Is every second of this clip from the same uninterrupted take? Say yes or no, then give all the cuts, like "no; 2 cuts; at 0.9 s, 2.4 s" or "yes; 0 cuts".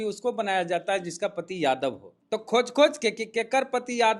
no; 1 cut; at 2.1 s